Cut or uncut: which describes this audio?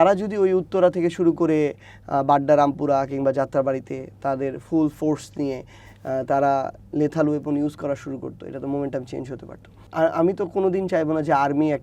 cut